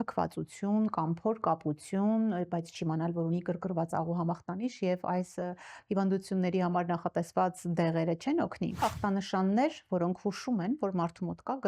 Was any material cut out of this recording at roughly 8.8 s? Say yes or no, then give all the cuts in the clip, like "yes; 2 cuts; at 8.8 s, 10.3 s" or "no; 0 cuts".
yes; 1 cut; at 8.8 s